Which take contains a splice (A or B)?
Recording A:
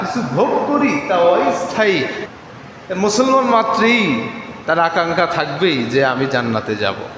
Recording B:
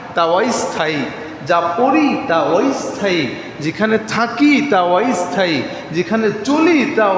A